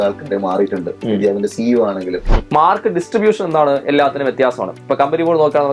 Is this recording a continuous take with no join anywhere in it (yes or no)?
no